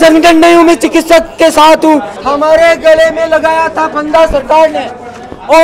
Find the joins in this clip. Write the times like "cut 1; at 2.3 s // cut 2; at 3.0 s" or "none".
cut 1; at 2.2 s